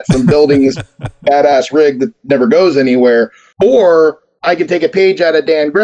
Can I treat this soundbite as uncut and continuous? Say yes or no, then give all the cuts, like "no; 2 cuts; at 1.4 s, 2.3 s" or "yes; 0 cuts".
no; 2 cuts; at 3.4 s, 4.3 s